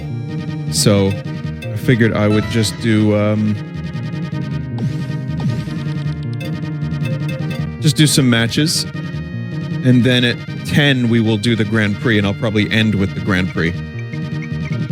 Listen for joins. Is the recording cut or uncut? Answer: cut